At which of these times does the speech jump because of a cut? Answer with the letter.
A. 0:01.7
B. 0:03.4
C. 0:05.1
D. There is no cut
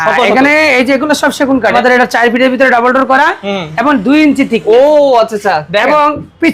A